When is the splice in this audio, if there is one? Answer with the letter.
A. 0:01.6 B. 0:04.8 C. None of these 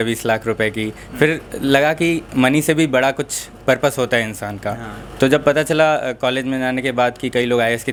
C